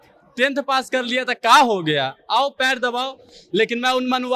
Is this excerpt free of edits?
yes; 0 cuts

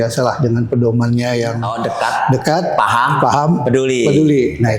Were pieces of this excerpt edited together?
yes; 1 cut; at 1.7 s

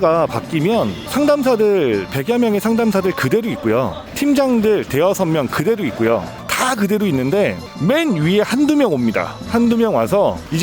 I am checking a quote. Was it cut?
yes; 1 cut; at 6.3 s

